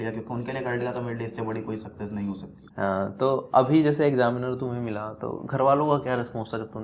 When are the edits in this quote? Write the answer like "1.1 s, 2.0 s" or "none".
2.6 s